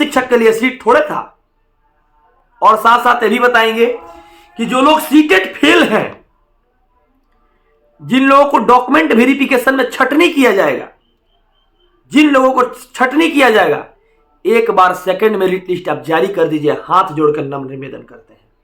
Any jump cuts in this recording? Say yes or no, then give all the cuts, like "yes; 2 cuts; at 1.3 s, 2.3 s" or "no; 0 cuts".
no; 0 cuts